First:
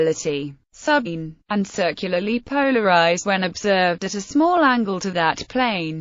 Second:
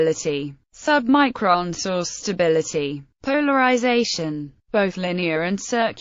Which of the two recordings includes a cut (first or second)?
second